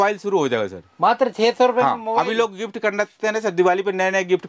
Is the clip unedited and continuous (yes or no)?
yes